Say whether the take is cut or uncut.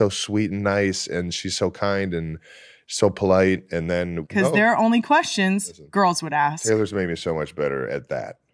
cut